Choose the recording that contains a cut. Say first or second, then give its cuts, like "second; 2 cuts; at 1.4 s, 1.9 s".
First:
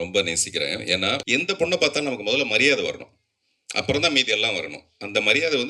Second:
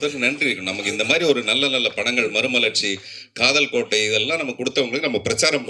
first; 1 cut; at 1.2 s